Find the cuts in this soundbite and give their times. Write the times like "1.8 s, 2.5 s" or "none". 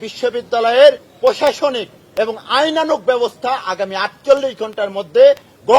none